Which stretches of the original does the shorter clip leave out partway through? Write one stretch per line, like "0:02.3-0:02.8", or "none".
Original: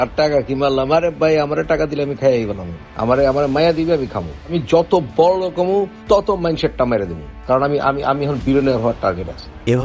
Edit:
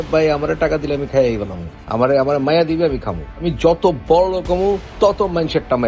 none